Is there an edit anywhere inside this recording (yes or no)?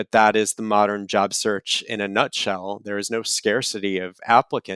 no